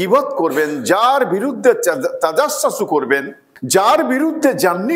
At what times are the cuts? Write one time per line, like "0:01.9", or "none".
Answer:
0:03.7

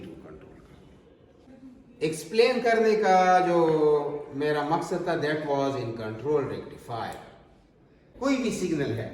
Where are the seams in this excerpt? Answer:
0:01.5
0:08.0

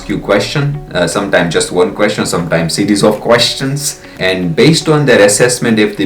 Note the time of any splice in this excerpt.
0:04.1

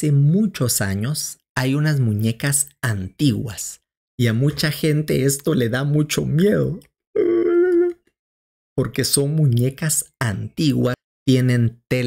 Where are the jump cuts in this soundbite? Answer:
0:11.0

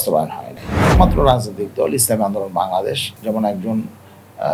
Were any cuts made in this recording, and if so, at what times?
0:00.9
0:03.1

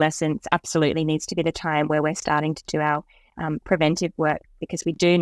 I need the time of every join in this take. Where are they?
none

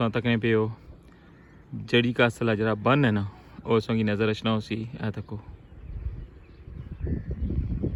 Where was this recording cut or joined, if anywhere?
none

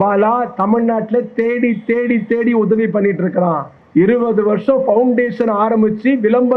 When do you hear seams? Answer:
0:03.7

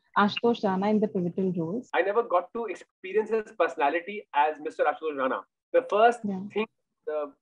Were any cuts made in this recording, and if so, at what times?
0:01.8

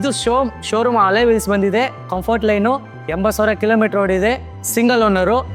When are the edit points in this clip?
none

